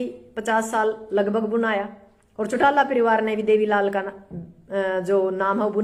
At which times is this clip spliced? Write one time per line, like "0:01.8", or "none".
none